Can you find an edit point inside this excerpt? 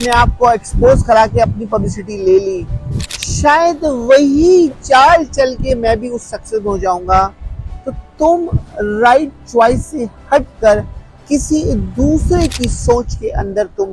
no; 0 cuts

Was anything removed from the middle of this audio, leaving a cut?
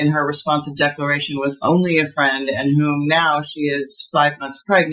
no; 0 cuts

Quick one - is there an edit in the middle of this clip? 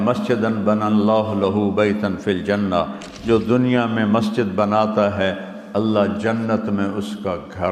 no; 0 cuts

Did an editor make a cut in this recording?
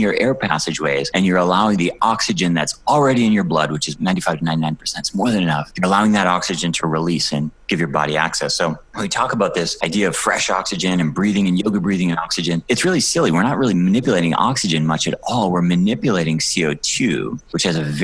yes; 1 cut; at 3.9 s

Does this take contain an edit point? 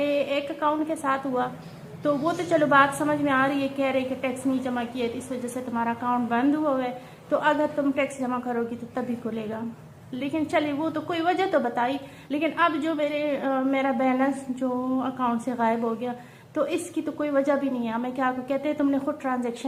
no; 0 cuts

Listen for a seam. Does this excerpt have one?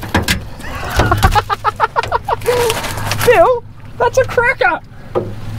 no; 0 cuts

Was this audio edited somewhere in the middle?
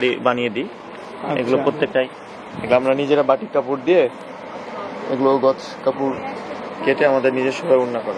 no; 0 cuts

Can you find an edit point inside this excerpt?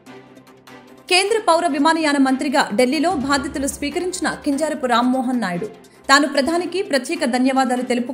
no; 0 cuts

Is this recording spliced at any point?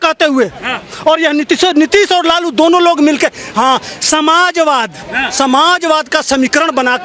no; 0 cuts

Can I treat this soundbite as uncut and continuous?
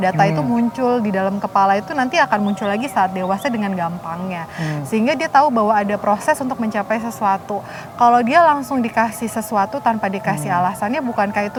yes; 0 cuts

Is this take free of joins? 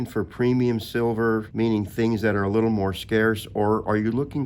no; 1 cut; at 1.5 s

